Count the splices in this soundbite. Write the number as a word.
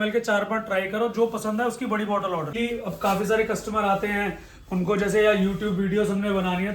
one